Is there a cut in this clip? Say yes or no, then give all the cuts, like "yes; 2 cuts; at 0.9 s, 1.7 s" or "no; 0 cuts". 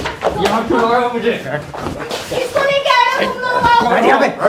no; 0 cuts